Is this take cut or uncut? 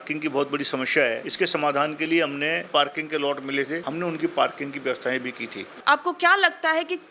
cut